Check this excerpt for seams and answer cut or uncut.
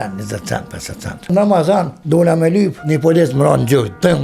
cut